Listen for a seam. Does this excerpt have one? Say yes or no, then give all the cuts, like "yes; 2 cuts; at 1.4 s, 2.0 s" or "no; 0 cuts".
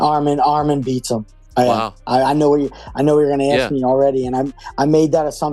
no; 0 cuts